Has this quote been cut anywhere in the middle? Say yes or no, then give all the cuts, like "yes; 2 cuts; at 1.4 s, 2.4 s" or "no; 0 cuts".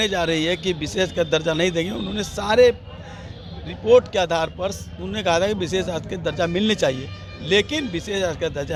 no; 0 cuts